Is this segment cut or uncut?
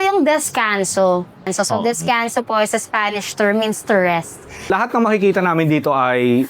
cut